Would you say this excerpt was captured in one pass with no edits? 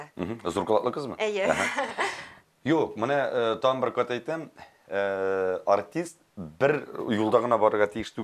yes; 0 cuts

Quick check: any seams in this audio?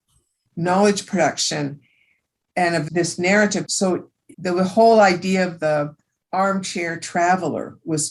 yes; 1 cut; at 3.9 s

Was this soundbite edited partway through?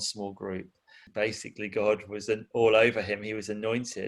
yes; 1 cut; at 1.0 s

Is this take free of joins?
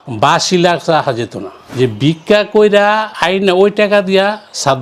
no; 1 cut; at 1.7 s

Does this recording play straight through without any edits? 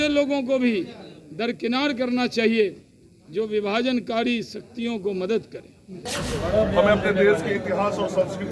no; 1 cut; at 6.0 s

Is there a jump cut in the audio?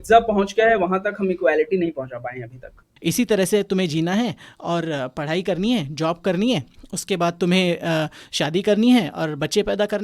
yes; 1 cut; at 2.9 s

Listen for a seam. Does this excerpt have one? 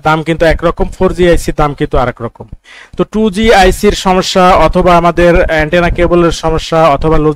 no; 0 cuts

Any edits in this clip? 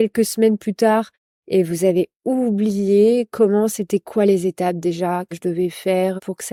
no; 0 cuts

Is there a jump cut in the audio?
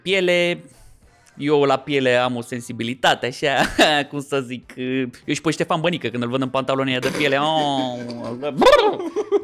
no; 0 cuts

